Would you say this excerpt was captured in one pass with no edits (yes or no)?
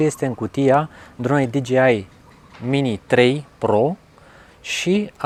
yes